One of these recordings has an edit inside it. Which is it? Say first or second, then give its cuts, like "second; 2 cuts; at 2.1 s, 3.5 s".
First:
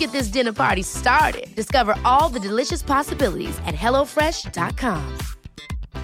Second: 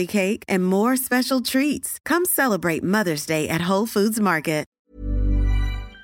second; 1 cut; at 4.8 s